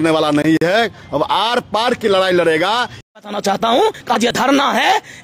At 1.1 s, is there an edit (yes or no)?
no